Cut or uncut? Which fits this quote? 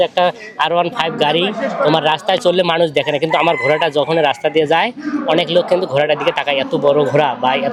uncut